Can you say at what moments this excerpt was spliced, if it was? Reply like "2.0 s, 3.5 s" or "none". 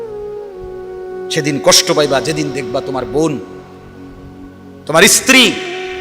1.3 s